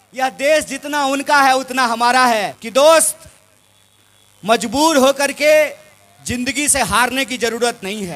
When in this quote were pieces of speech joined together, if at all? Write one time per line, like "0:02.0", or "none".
0:02.6